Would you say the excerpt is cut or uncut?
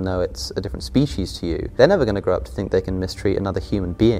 cut